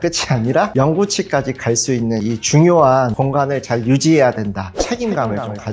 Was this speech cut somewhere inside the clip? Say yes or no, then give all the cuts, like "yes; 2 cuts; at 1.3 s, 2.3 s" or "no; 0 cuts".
no; 0 cuts